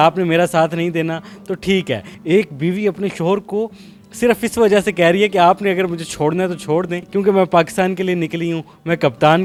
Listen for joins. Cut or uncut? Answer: uncut